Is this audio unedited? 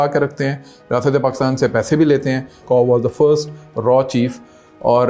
no; 1 cut; at 2.6 s

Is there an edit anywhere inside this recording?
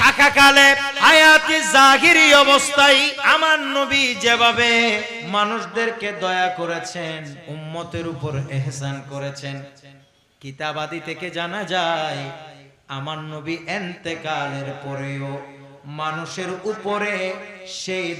yes; 4 cuts; at 0.9 s, 3.2 s, 5.1 s, 7.4 s

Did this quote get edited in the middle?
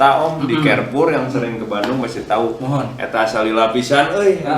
no; 0 cuts

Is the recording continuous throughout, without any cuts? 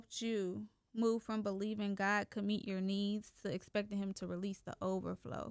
yes; 0 cuts

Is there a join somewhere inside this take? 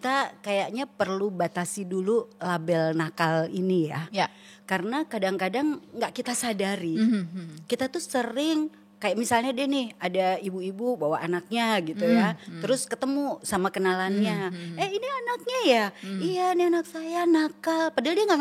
no; 0 cuts

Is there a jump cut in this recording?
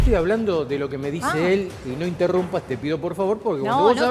no; 0 cuts

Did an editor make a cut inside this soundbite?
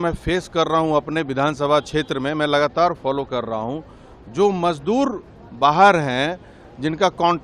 no; 0 cuts

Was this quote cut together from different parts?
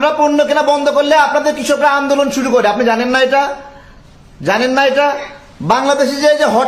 no; 0 cuts

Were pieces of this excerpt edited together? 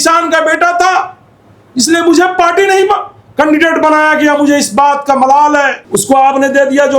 yes; 1 cut; at 5.8 s

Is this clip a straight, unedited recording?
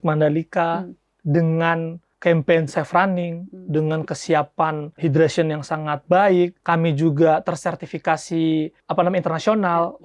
no; 4 cuts; at 2.0 s, 4.9 s, 6.6 s, 8.8 s

